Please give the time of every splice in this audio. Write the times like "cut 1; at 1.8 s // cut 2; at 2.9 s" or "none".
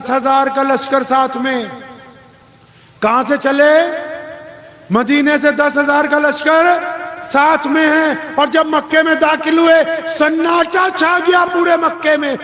none